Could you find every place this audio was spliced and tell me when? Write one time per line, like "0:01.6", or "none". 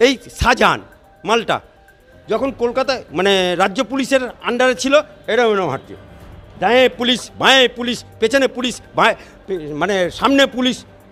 none